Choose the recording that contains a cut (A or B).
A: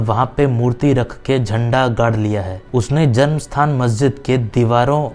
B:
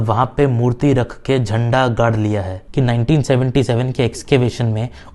B